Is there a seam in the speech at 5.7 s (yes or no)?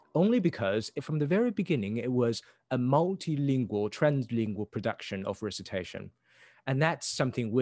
no